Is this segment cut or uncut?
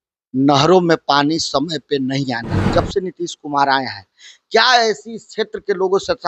cut